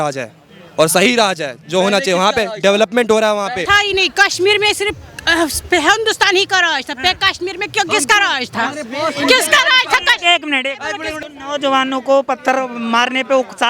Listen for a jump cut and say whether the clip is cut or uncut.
cut